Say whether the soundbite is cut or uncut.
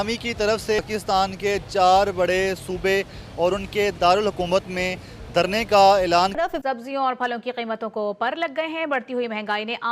cut